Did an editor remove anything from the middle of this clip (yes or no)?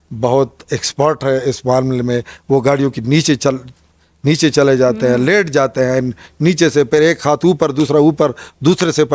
no